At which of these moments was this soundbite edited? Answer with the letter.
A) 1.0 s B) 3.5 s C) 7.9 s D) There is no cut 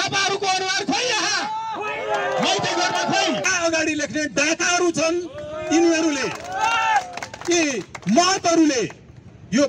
B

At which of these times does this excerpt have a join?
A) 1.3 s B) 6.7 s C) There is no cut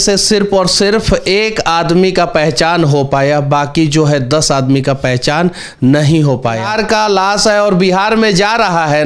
B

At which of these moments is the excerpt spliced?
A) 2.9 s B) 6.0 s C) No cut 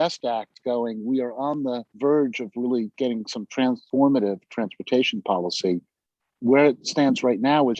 C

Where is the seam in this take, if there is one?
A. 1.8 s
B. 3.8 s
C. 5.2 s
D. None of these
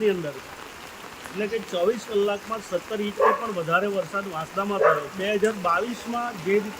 C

